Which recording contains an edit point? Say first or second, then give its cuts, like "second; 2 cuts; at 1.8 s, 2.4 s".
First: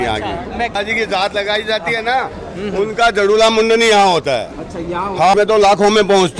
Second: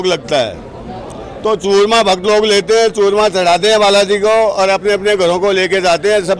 first; 2 cuts; at 0.7 s, 5.3 s